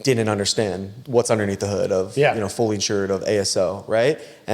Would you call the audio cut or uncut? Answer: cut